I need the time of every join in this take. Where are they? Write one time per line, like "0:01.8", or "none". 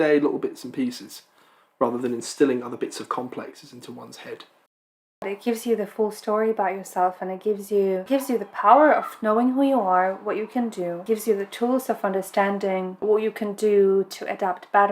0:05.3
0:08.0
0:11.0
0:13.0

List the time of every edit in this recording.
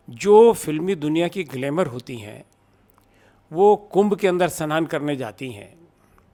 none

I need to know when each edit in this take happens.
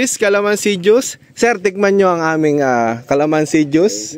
none

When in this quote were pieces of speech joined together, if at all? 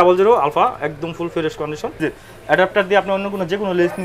0:02.0

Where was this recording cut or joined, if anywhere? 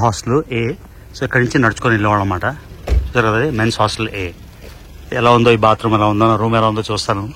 none

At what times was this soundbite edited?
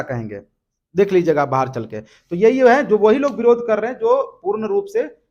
none

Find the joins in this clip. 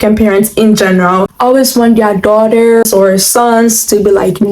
0:01.3
0:02.8

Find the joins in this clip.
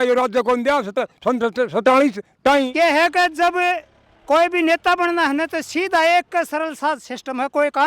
0:02.7

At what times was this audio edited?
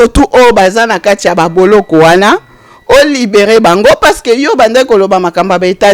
none

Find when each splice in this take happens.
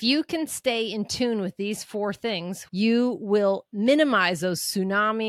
0:02.7

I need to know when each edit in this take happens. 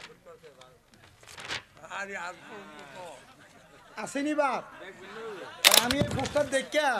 none

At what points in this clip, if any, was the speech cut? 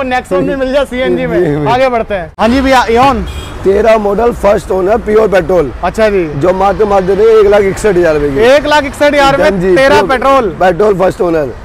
none

